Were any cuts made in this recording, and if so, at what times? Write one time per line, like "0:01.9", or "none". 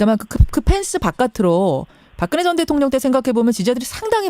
0:03.2